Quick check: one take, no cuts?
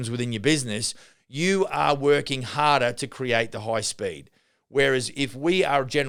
yes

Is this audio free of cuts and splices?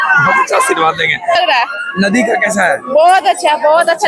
no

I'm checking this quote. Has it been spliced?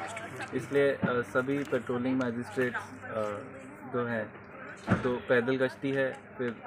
no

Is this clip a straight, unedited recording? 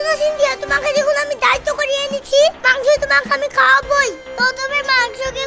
yes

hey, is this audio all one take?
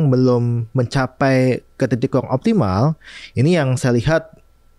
yes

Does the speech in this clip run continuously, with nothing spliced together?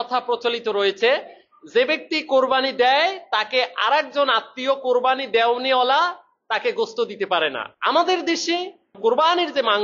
no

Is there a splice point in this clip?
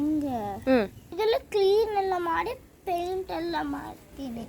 yes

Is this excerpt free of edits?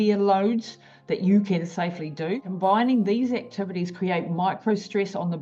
no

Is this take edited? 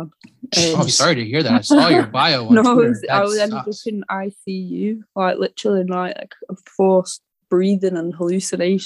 no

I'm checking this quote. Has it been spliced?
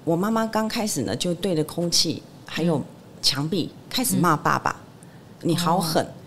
no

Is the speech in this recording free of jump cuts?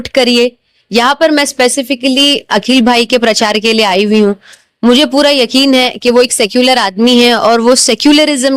yes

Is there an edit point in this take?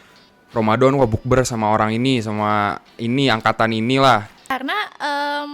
yes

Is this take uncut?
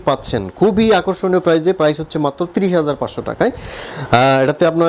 yes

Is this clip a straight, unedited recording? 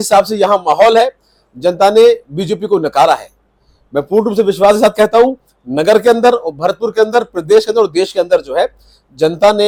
yes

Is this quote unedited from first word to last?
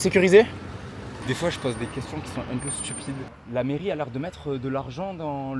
no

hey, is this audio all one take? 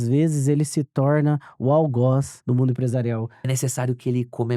no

